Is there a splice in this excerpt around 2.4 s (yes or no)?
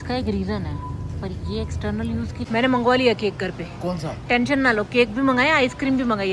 yes